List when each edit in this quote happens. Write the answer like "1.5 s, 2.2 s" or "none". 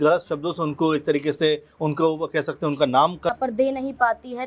3.3 s